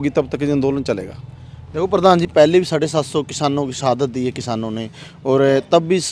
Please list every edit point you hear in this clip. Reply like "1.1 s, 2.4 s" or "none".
none